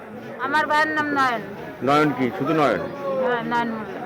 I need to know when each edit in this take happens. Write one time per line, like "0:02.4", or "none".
none